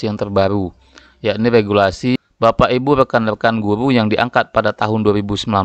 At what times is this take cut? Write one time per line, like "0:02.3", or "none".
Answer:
0:02.1